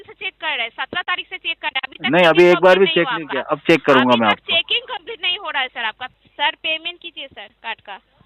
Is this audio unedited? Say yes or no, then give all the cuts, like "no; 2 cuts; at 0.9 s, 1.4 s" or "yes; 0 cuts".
no; 1 cut; at 6.1 s